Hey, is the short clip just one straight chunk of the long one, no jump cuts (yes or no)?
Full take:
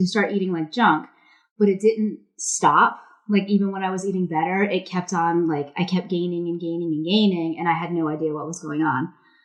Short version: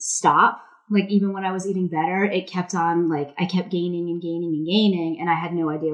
yes